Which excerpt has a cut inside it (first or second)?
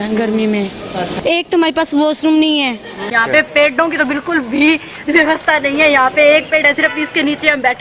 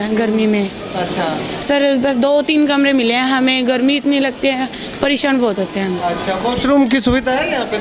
first